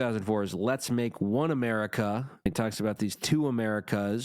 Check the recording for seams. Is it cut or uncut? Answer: cut